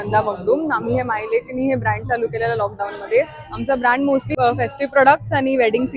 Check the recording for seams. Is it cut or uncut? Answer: cut